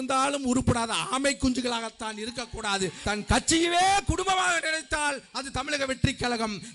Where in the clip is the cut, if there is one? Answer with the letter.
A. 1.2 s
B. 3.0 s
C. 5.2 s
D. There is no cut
B